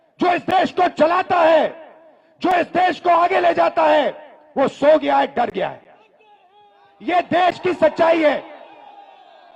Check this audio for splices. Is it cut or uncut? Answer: uncut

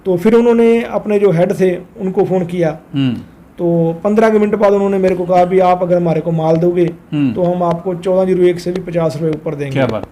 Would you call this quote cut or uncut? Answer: uncut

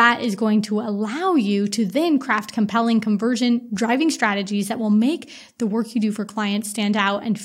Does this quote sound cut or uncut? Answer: uncut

